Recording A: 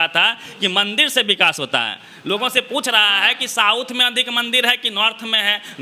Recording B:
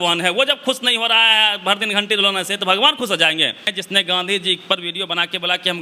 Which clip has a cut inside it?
B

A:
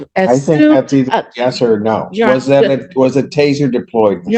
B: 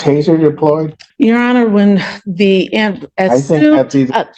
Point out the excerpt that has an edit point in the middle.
B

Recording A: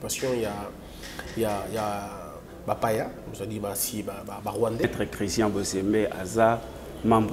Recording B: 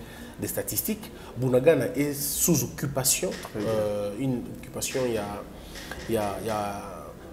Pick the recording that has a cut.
A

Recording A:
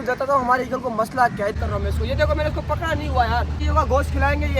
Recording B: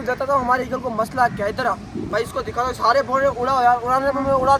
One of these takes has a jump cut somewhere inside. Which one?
A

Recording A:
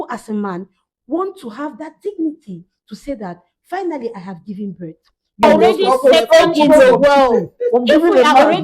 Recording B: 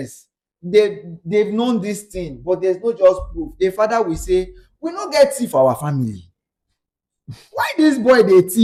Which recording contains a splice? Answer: A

